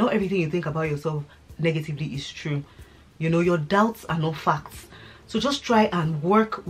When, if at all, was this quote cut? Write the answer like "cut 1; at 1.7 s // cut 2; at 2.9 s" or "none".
none